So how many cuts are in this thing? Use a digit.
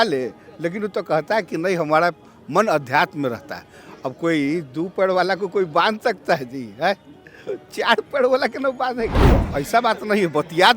1